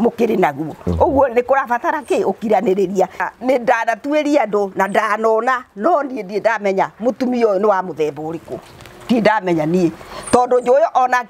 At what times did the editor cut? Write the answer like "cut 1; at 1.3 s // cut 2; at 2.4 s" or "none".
cut 1; at 3.3 s